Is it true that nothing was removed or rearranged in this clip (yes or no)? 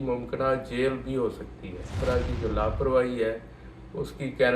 no